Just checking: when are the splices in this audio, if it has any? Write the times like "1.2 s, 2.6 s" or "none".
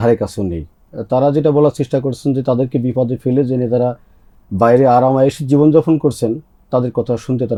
none